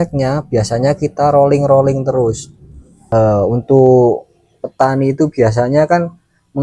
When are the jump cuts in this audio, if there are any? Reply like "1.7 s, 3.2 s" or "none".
2.9 s